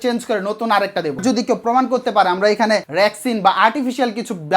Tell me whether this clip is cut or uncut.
cut